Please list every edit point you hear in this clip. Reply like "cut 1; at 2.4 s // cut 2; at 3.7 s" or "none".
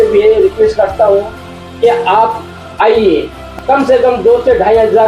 cut 1; at 3.4 s